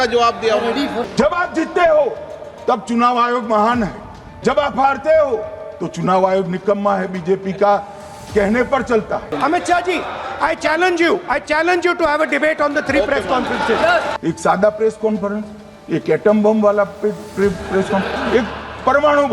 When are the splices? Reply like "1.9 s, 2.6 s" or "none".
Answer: 1.1 s, 9.3 s, 14.1 s